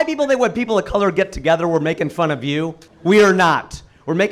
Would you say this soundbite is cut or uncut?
cut